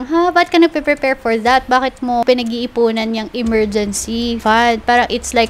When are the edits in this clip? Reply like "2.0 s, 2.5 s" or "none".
2.2 s, 4.4 s